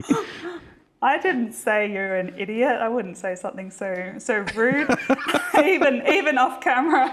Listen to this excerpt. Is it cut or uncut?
uncut